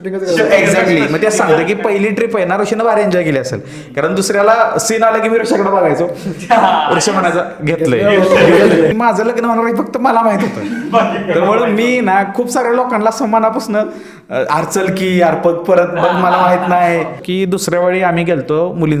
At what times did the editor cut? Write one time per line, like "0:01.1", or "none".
0:08.9
0:17.2